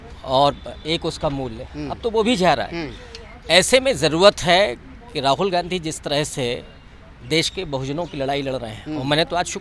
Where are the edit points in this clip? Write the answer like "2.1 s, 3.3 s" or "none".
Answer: none